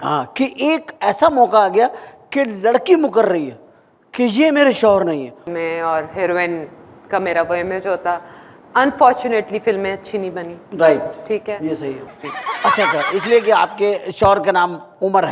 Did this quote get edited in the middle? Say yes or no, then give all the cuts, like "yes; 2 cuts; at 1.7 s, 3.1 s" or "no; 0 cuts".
yes; 2 cuts; at 5.4 s, 12.1 s